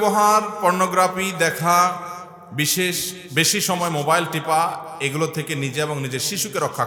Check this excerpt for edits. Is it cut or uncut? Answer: uncut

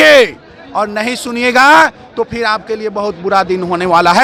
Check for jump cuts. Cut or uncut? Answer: uncut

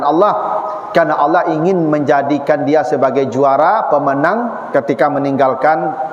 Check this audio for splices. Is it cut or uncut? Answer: uncut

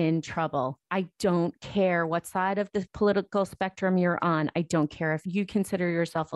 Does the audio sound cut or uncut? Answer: cut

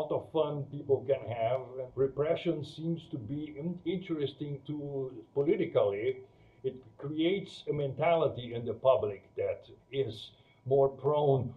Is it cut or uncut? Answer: cut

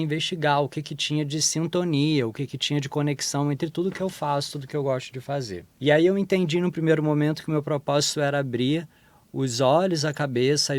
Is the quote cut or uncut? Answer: uncut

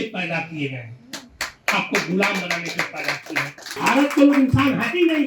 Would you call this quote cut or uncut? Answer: cut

